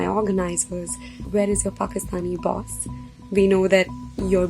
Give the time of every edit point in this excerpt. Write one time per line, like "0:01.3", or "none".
0:01.2